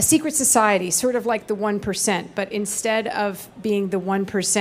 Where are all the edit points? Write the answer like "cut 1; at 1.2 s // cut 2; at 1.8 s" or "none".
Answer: none